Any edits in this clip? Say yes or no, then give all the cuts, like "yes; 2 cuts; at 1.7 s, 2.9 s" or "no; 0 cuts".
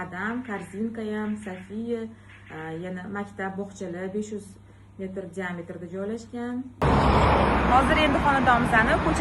yes; 1 cut; at 6.8 s